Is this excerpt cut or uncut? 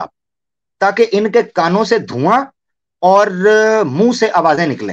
uncut